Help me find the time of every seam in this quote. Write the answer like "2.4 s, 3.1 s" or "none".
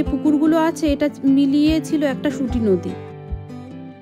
2.9 s